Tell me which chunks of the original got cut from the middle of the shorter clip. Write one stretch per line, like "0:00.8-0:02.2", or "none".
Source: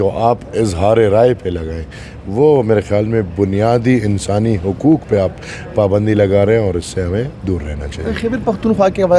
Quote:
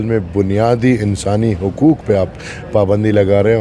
none